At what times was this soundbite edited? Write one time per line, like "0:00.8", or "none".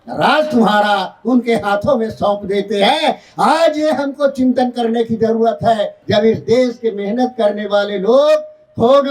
0:05.9

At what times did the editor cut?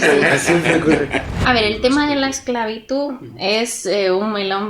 0:01.3

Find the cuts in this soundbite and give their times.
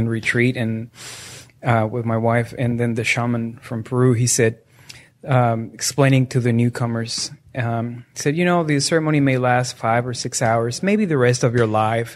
none

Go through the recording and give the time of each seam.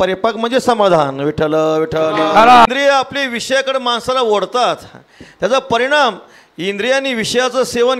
0:02.7

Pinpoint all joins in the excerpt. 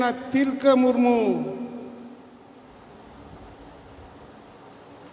none

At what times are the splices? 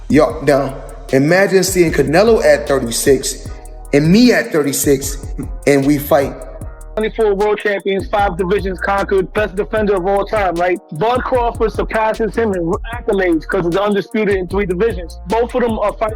0:07.0

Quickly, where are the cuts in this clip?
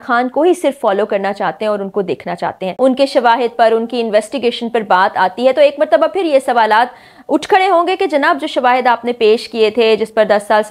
0:02.7

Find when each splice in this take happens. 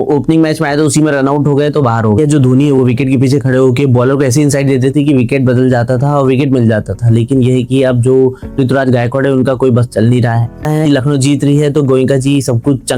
0:02.2
0:10.6

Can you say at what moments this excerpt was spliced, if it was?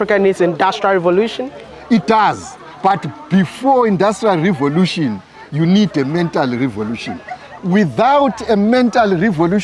0:01.7

